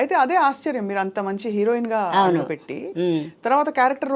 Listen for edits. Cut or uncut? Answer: uncut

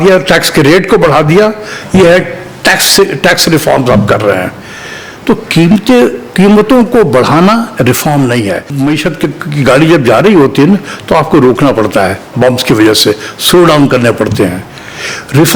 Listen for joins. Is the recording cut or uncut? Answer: cut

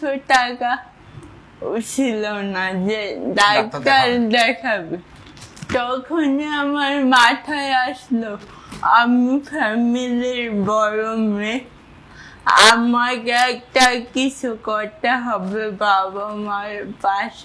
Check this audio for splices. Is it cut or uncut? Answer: uncut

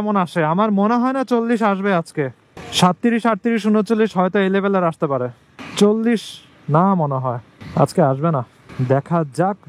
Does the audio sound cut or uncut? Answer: uncut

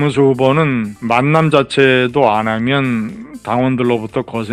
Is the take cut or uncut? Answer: uncut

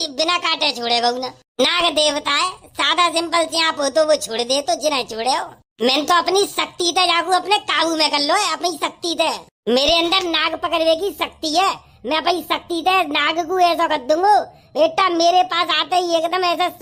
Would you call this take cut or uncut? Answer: uncut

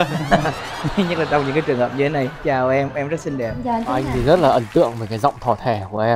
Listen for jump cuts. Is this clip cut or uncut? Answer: cut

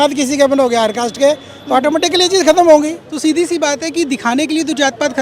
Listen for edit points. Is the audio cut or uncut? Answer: cut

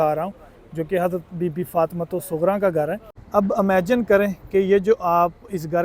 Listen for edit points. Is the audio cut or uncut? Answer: cut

